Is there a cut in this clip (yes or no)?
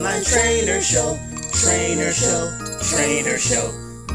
no